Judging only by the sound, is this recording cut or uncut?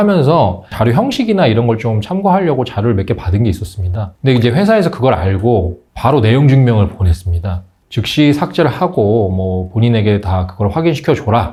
uncut